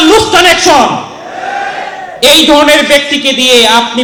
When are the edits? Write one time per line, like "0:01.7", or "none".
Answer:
none